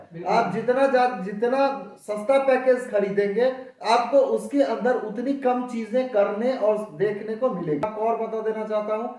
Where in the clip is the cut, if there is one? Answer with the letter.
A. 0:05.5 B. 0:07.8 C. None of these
B